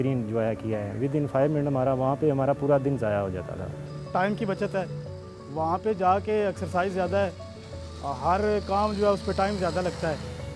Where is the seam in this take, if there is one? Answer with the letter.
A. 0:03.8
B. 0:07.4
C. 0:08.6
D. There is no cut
A